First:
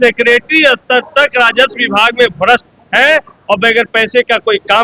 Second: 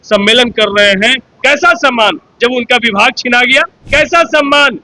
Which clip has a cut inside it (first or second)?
second